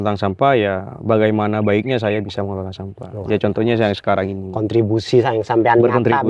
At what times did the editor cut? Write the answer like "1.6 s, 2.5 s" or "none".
none